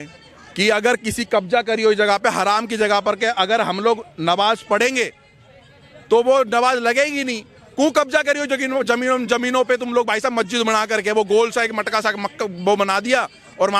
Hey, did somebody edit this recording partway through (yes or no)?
no